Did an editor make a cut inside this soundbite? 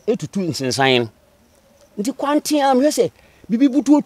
no; 0 cuts

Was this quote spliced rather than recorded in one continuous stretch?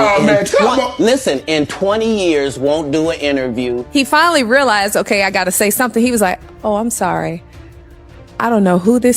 yes; 1 cut; at 3.8 s

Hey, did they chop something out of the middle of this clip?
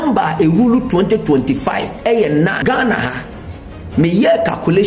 yes; 1 cut; at 2.6 s

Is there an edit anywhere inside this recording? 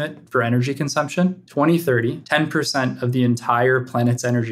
yes; 2 cuts; at 1.4 s, 2.2 s

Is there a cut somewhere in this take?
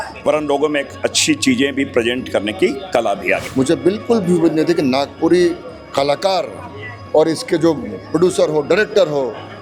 yes; 1 cut; at 3.4 s

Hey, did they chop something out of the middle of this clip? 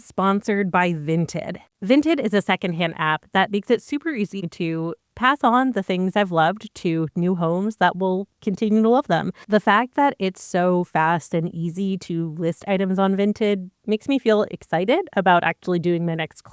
yes; 3 cuts; at 1.6 s, 4.5 s, 9.3 s

